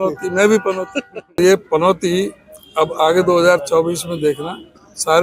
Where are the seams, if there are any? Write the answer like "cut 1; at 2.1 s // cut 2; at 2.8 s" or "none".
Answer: cut 1; at 1.4 s